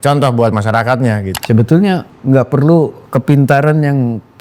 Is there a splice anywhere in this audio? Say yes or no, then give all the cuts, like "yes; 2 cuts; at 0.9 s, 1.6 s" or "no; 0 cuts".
yes; 3 cuts; at 1.3 s, 2.1 s, 3.0 s